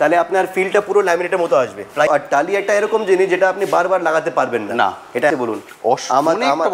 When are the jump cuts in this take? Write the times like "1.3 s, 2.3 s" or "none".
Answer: 2.1 s, 5.3 s